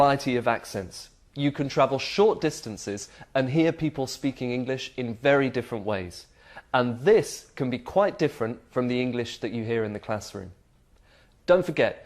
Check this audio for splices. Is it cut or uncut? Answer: cut